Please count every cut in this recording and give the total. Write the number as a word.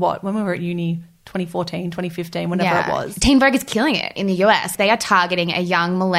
two